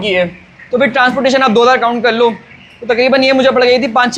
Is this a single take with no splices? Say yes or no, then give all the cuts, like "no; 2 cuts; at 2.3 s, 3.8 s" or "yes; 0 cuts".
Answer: yes; 0 cuts